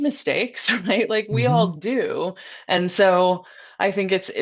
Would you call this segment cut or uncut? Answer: uncut